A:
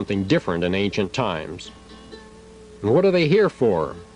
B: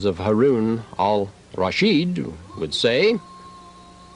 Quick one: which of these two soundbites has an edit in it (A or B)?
A